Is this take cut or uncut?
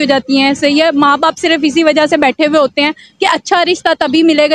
uncut